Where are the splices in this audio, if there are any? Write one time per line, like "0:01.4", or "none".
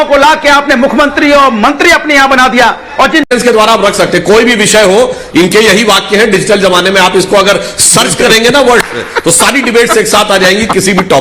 0:03.3